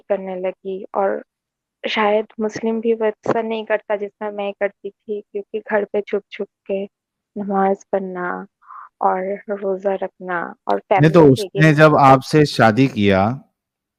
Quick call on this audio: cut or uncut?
uncut